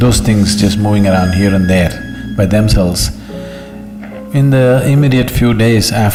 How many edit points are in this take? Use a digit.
0